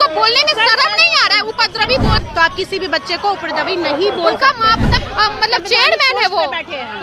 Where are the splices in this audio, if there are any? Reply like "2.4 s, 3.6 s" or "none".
2.2 s, 5.0 s